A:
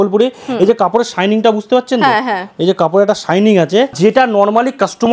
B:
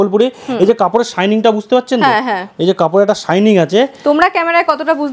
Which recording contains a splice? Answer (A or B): A